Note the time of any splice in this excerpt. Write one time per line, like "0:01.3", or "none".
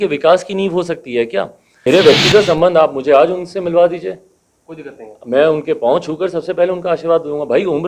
0:01.8